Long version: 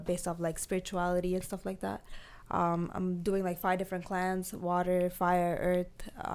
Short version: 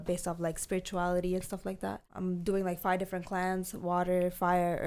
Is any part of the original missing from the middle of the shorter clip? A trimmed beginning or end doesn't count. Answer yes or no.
yes